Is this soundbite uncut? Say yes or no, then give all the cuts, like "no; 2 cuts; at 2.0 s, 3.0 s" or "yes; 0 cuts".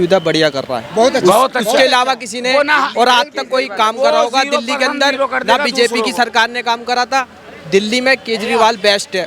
yes; 0 cuts